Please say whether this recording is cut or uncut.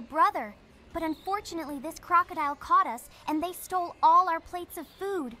uncut